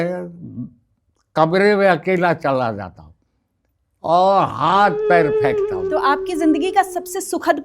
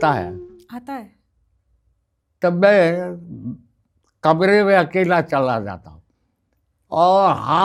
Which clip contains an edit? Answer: first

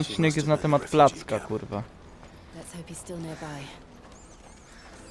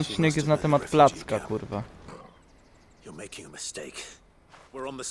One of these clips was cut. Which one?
second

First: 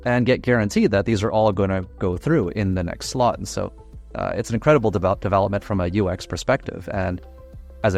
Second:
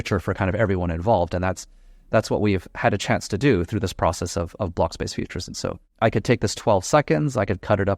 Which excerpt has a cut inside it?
second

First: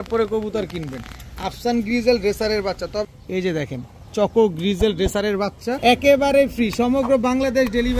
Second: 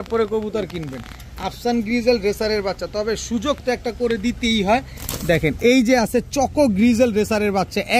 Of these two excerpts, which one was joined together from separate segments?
first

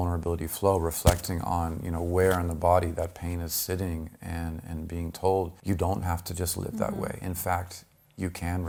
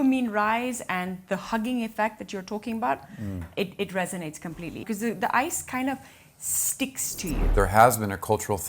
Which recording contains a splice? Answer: second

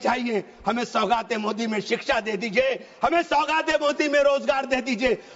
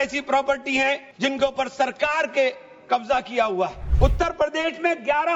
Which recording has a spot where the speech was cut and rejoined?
second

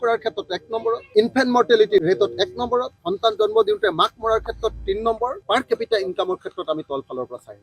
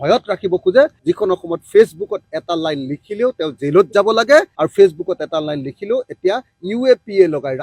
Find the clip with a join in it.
first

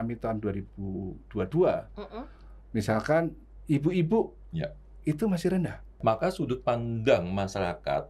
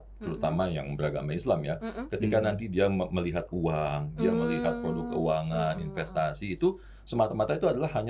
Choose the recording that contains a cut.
first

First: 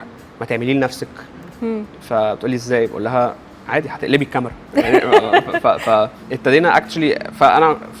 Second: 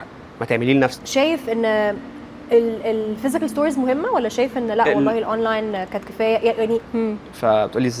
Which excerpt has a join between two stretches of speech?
second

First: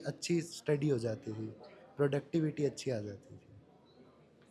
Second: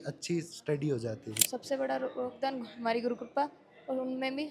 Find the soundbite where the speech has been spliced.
second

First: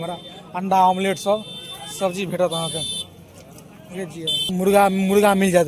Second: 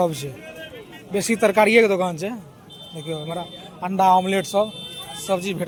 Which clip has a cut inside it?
first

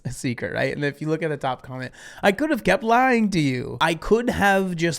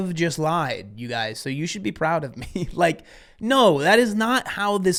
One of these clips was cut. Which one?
first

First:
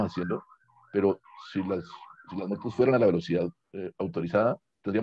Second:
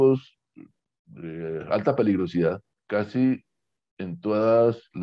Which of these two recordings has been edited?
second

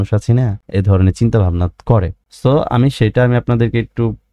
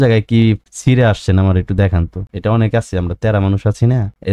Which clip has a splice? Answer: second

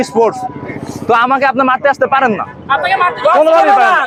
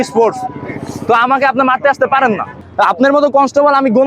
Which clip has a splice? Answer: second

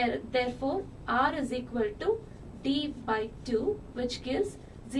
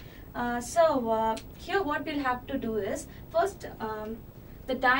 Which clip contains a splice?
first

